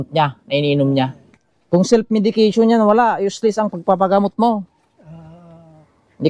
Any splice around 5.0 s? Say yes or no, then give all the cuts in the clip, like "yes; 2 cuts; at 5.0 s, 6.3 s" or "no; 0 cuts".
no; 1 cut; at 1.3 s